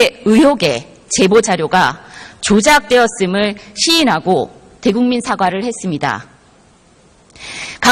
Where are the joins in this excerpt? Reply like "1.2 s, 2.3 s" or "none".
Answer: 0.9 s

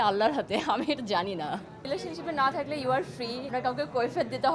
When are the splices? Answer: 1.8 s, 3.5 s

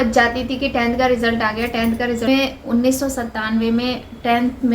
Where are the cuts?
2.3 s

